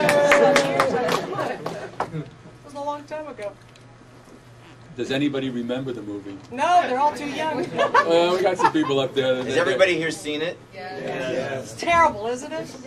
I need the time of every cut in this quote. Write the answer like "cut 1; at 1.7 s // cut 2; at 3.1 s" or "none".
none